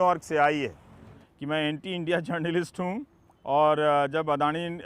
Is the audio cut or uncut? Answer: cut